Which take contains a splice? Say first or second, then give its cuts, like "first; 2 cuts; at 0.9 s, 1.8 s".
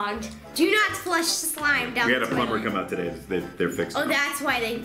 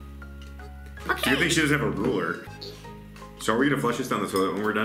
second; 1 cut; at 3.3 s